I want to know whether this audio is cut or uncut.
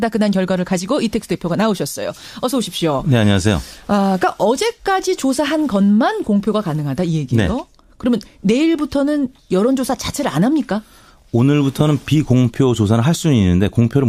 cut